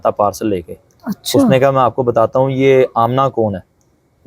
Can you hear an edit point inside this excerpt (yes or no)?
no